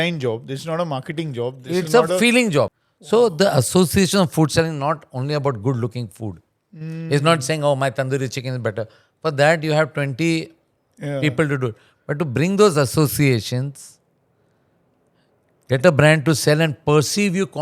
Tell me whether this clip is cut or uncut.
cut